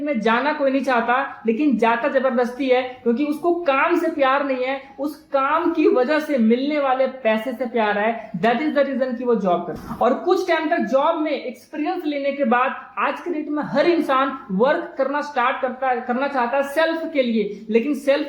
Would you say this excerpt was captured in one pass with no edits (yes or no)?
yes